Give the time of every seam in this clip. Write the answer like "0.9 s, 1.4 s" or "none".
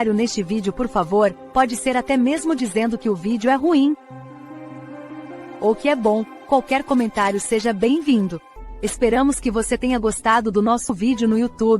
8.5 s, 10.9 s

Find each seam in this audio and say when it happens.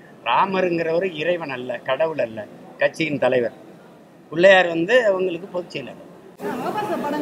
6.3 s

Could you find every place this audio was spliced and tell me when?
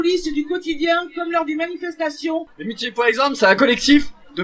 2.6 s

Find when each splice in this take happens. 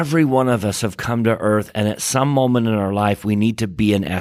none

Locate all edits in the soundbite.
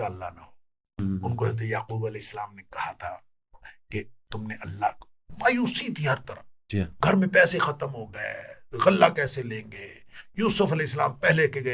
1.0 s

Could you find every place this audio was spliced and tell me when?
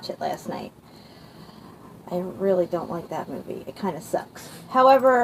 none

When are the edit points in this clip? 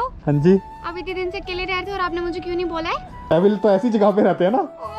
3.3 s

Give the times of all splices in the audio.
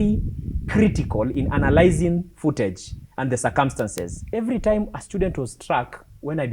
4.2 s

